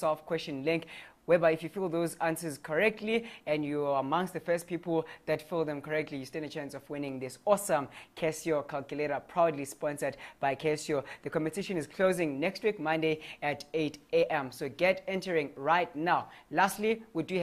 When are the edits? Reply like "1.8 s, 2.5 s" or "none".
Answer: none